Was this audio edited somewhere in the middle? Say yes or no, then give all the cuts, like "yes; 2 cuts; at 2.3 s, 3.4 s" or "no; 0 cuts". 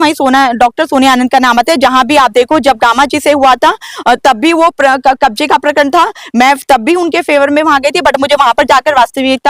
no; 0 cuts